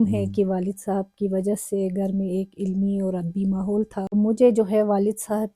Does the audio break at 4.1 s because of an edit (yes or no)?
yes